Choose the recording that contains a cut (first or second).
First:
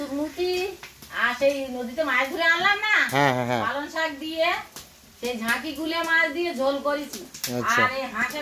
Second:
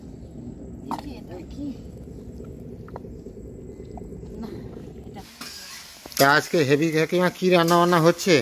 second